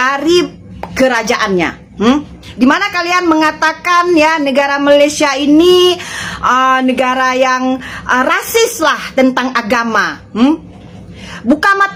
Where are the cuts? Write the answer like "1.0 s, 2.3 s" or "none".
none